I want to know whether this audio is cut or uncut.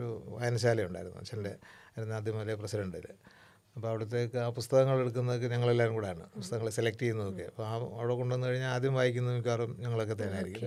uncut